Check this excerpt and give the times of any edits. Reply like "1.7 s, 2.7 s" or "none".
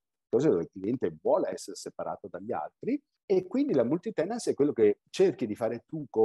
3.1 s, 5.1 s